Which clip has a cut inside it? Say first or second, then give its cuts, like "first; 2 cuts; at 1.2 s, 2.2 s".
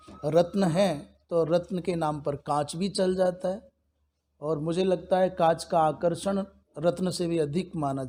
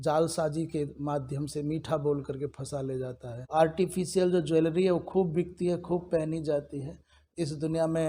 second; 2 cuts; at 3.5 s, 7.2 s